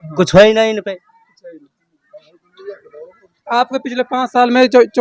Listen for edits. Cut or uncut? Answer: uncut